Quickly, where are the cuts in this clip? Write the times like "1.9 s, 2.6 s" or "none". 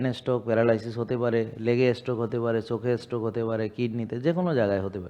none